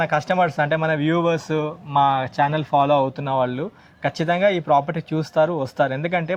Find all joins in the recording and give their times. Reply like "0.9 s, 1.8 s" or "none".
none

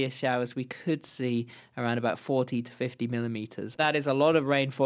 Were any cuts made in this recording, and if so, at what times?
3.8 s

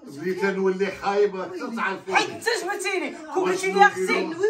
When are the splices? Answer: none

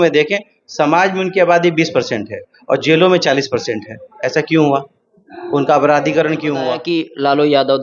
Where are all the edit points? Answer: 6.8 s

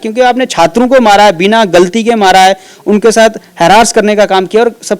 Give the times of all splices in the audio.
none

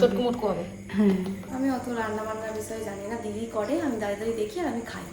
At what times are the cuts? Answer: 1.5 s

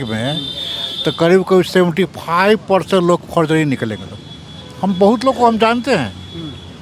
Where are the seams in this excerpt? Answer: none

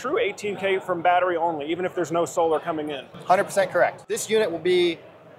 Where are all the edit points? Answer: 4.0 s

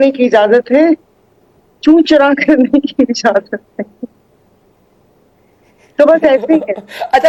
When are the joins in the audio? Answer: none

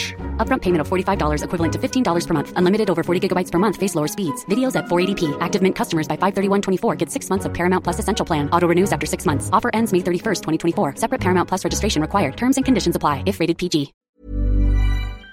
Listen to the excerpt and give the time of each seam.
14.1 s

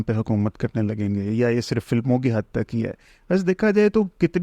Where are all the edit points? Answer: none

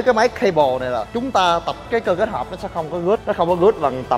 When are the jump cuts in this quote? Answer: 1.8 s, 3.2 s

